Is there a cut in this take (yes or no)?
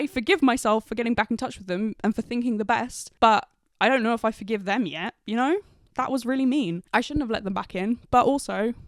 no